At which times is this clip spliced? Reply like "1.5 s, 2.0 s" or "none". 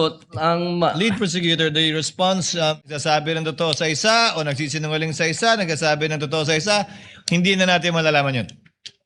2.8 s